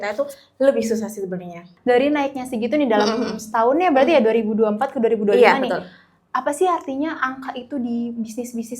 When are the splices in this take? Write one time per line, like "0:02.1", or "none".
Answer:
0:01.7

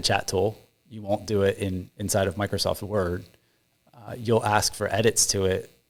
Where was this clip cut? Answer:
none

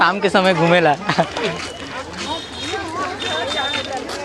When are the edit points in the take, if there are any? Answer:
none

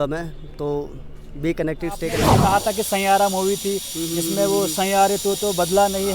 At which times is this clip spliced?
0:02.4

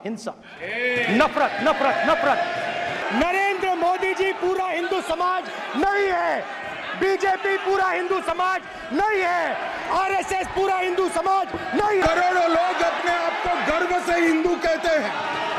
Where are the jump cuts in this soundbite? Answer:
0:03.0
0:12.0

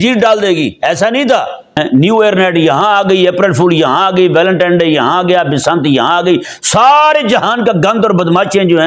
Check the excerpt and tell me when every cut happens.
0:01.8

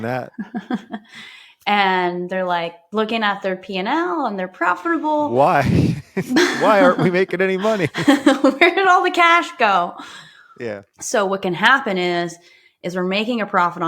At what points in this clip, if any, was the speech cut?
0:10.9

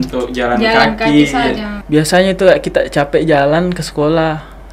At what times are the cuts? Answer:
0:01.7

